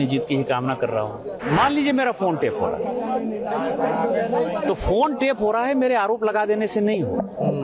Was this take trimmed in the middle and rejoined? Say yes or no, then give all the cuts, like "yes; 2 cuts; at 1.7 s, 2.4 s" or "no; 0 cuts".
yes; 1 cut; at 1.4 s